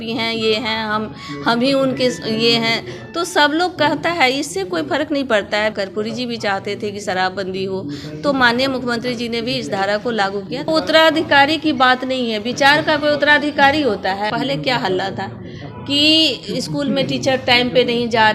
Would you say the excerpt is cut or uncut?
cut